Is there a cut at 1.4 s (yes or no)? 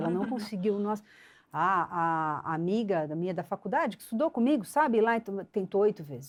no